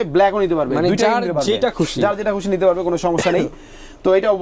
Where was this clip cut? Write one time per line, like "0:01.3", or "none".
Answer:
none